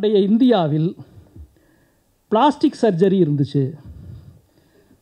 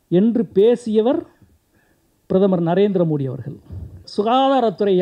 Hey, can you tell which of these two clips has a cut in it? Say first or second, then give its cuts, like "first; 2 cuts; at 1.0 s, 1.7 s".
second; 1 cut; at 4.0 s